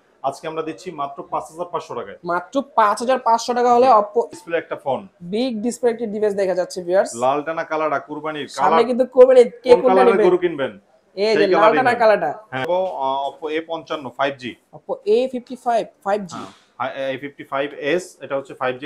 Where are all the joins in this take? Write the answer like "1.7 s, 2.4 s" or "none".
4.3 s, 12.7 s